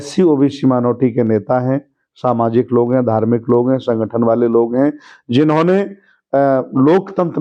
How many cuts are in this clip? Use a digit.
0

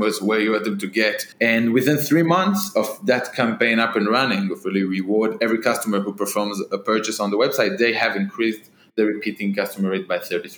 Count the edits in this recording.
1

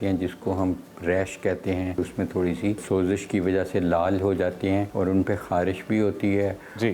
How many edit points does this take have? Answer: 3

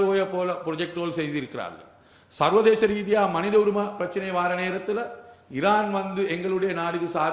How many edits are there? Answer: 0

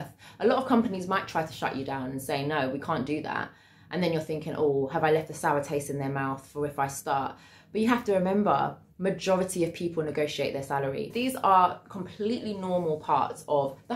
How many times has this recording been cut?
1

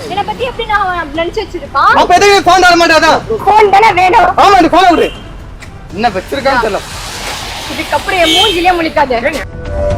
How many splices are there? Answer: 0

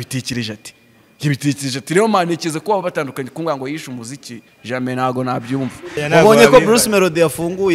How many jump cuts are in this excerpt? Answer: 1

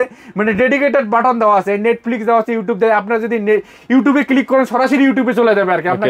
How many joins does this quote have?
0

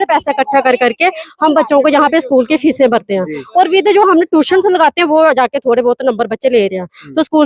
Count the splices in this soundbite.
0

